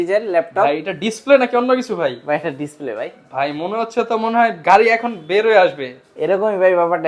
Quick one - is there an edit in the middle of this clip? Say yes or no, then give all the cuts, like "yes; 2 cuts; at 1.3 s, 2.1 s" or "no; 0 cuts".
no; 0 cuts